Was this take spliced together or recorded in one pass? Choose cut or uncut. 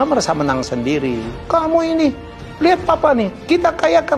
uncut